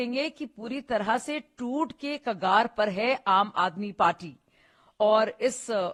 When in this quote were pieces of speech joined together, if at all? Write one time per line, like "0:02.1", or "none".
none